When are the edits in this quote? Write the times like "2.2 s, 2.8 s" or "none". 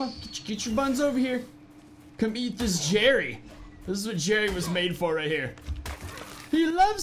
none